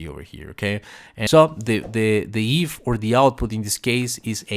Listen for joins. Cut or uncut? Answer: cut